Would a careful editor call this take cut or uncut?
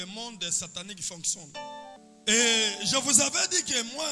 cut